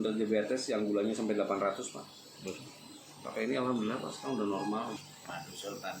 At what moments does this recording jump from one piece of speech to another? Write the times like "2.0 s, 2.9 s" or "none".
5.0 s